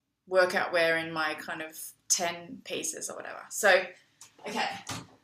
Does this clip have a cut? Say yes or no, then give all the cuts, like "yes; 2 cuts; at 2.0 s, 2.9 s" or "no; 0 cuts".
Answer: yes; 1 cut; at 3.4 s